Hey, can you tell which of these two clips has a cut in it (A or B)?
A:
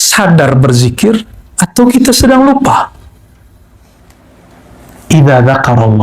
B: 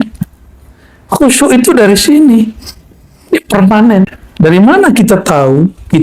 B